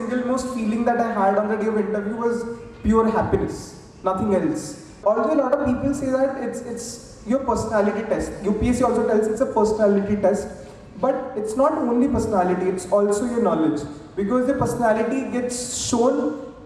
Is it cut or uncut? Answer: cut